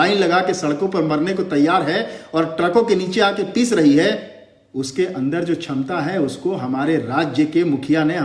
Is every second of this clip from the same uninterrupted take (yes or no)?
yes